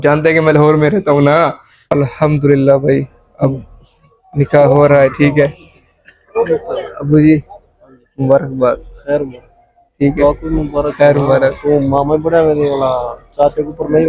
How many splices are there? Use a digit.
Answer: 1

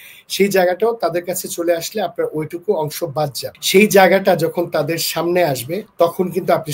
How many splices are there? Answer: 2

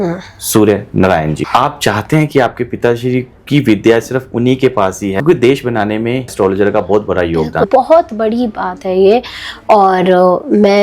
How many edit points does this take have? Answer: 4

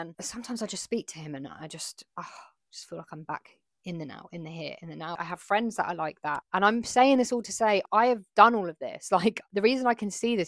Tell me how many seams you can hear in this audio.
0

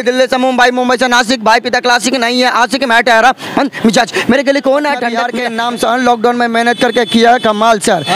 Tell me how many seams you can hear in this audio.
1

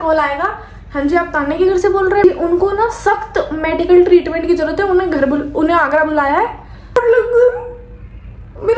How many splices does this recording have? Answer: 2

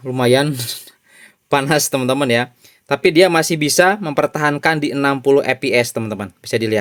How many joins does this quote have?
0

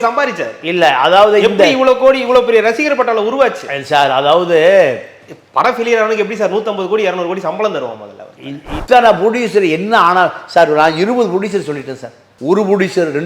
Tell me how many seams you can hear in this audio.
1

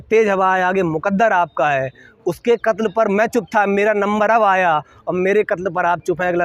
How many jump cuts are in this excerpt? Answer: 0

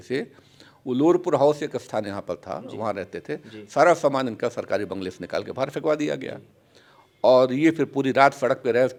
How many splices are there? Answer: 0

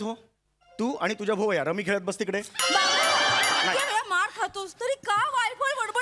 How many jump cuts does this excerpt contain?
1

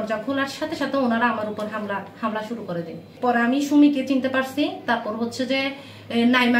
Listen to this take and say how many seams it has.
1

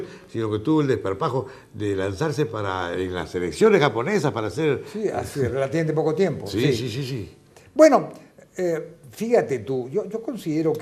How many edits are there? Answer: 1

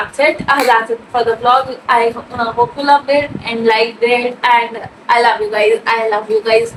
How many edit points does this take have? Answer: 0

